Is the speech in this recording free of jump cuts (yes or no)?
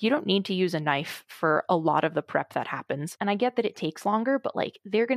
no